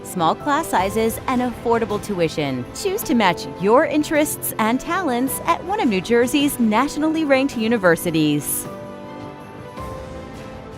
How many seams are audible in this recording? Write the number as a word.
one